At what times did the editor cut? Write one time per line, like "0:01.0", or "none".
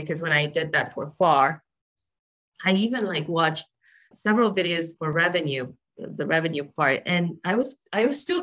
0:04.1